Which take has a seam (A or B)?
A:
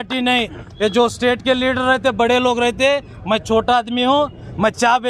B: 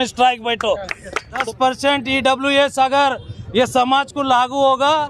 B